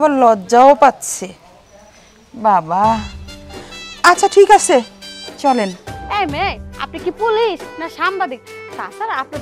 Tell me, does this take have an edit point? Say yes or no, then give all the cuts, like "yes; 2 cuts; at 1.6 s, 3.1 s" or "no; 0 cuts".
yes; 1 cut; at 5.9 s